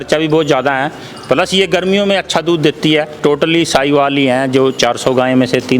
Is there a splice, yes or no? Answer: yes